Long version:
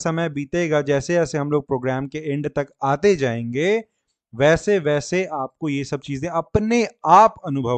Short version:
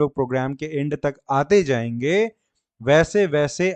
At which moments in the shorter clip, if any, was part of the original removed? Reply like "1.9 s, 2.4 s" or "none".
none

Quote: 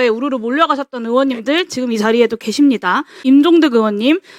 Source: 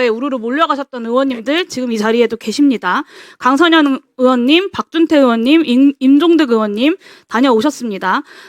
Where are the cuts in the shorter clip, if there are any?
3.2 s

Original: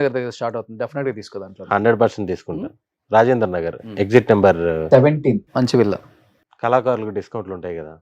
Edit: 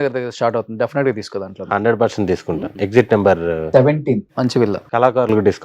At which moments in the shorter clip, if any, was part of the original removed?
2.7 s, 4.8 s

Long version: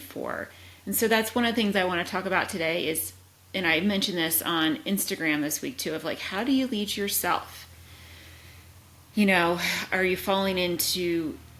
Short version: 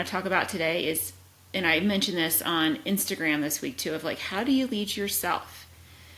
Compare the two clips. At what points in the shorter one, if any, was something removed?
none

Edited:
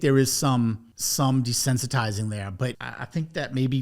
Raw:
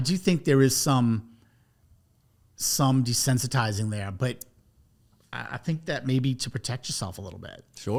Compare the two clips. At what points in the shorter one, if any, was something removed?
0.9 s, 2.9 s

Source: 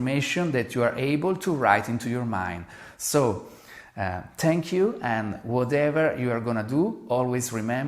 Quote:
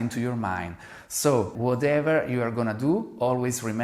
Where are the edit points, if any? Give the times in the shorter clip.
1.5 s

